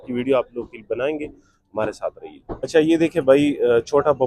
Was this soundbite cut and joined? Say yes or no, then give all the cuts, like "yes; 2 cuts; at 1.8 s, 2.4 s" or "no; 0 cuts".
no; 0 cuts